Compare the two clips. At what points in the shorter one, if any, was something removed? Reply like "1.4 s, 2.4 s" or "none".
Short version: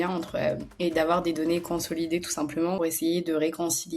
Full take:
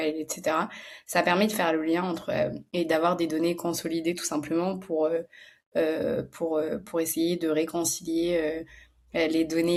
2.8 s